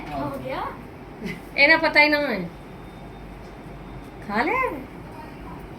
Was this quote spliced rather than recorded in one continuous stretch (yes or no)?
no